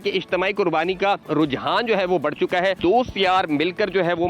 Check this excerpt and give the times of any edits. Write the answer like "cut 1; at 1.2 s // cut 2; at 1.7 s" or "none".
cut 1; at 1.2 s // cut 2; at 2.8 s